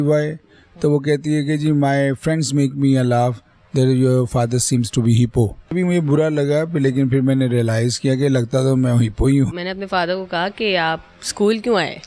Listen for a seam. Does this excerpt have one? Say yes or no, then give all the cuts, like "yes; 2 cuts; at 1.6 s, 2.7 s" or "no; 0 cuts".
yes; 2 cuts; at 5.7 s, 9.5 s